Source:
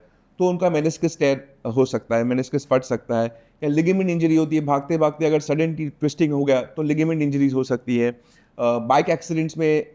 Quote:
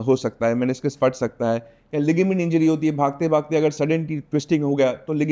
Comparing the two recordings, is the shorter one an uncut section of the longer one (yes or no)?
yes